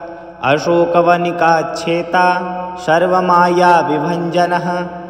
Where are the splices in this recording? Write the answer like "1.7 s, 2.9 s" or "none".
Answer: none